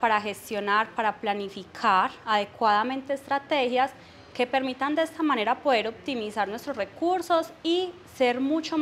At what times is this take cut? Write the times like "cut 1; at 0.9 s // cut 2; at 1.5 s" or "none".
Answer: none